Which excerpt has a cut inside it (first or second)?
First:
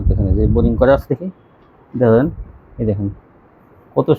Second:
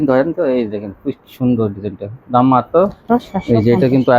second